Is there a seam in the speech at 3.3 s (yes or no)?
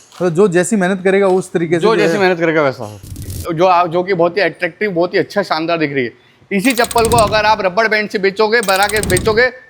yes